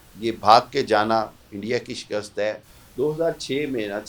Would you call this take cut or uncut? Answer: cut